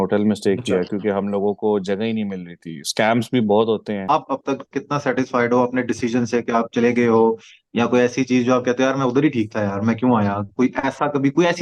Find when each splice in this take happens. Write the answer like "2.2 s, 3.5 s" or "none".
4.1 s